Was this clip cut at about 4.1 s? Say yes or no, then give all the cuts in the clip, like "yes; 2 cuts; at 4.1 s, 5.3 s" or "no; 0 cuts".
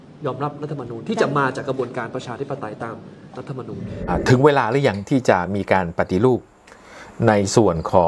yes; 1 cut; at 4.1 s